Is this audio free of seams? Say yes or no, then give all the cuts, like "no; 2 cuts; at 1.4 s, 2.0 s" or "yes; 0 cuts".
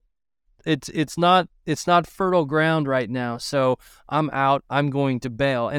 yes; 0 cuts